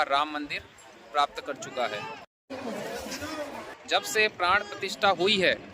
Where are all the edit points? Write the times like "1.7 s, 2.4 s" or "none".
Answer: 3.7 s